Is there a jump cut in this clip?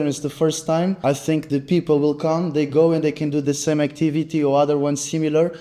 yes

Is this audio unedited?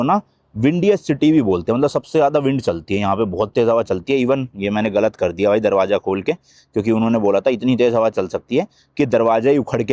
yes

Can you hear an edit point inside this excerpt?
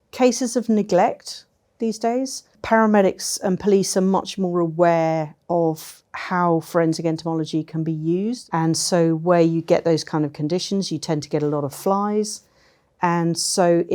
yes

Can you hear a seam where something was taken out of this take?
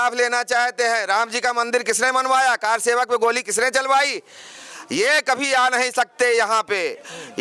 no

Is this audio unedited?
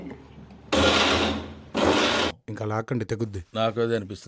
no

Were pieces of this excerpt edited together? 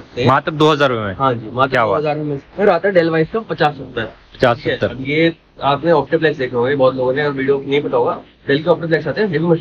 yes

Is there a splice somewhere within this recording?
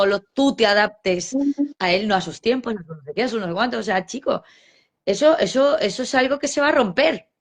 no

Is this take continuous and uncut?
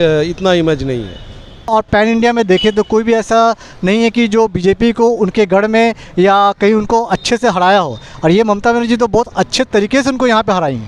no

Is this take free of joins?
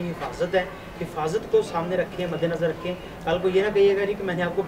yes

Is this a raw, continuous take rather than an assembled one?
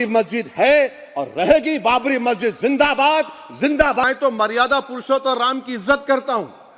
no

